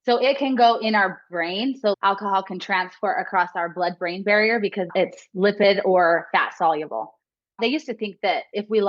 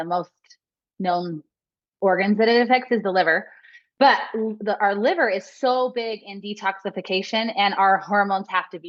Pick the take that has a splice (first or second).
first